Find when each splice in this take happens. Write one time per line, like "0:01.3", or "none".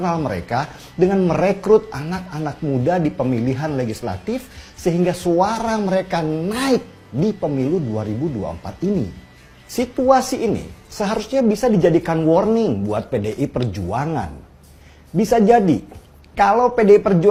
none